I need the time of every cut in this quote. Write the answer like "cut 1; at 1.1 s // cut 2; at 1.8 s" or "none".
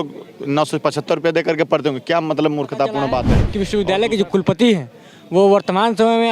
cut 1; at 3.4 s